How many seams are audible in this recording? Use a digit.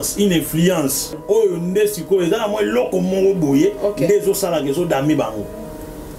1